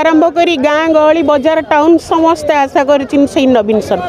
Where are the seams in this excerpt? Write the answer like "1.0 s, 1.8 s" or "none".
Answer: none